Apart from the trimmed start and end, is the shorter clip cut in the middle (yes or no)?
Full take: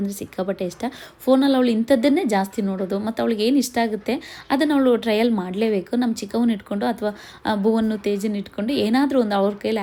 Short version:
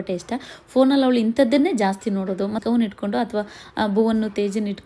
yes